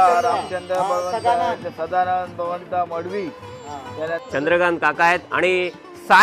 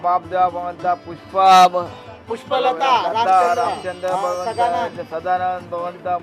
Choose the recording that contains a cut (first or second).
first